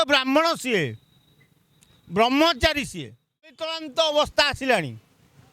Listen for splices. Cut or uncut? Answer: cut